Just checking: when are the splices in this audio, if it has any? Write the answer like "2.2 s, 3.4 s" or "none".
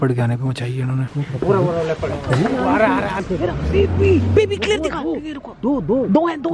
3.2 s